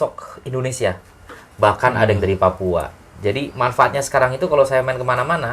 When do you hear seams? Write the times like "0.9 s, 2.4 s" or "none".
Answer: none